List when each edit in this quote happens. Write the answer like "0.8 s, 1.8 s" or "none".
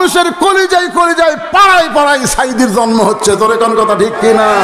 none